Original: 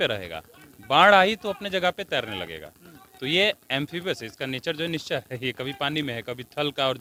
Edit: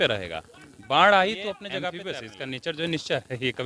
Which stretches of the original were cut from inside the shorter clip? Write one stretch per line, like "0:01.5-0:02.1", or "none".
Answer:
0:02.0-0:04.0